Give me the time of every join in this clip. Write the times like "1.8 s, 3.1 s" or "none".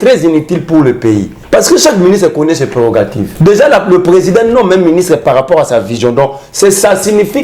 1.4 s, 3.2 s

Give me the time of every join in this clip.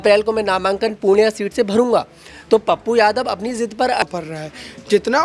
4.0 s

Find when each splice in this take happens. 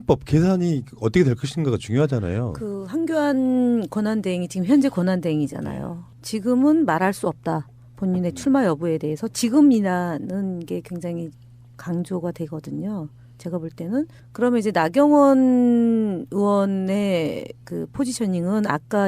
1.1 s

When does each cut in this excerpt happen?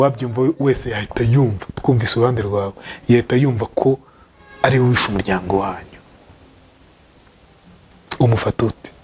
none

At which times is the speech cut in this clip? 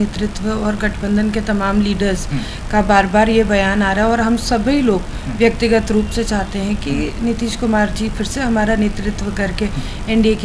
none

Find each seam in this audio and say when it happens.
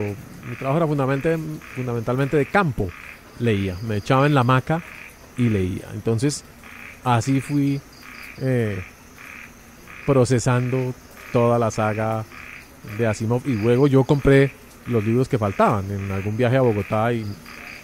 3.0 s

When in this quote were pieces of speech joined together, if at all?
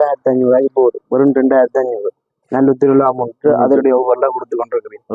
none

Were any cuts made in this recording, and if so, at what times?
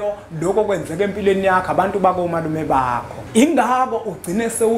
3.1 s

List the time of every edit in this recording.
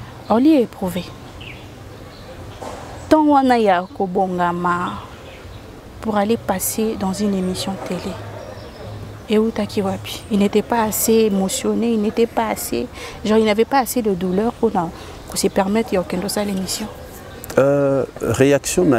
none

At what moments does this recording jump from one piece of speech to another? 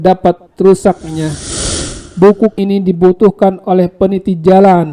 1.4 s, 2.5 s

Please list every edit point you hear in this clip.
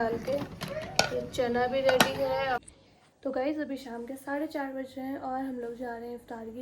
2.6 s

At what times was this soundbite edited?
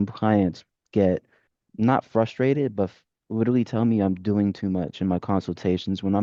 none

